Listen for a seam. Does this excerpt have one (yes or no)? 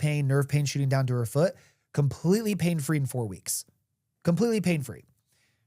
no